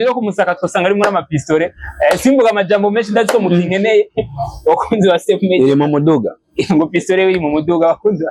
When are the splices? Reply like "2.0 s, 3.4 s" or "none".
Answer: none